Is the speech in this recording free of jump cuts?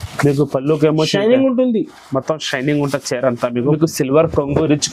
no; 1 cut; at 3.7 s

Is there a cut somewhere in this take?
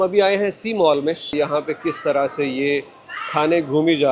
yes; 1 cut; at 1.3 s

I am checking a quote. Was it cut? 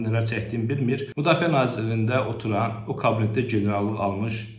yes; 1 cut; at 1.1 s

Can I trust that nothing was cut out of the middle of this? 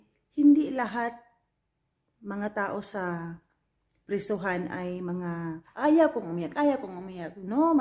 no; 1 cut; at 5.6 s

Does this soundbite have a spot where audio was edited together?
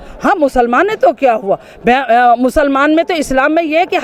no; 0 cuts

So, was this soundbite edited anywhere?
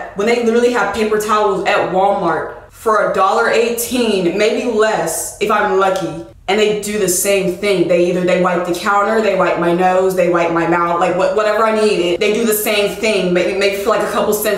no; 0 cuts

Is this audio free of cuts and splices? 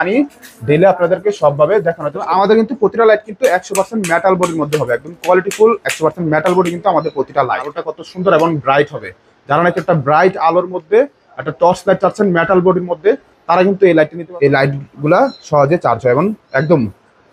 no; 3 cuts; at 2.3 s, 7.7 s, 14.2 s

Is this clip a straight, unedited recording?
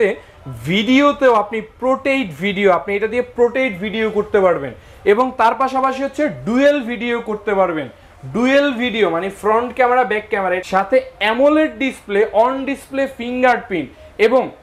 no; 1 cut; at 10.6 s

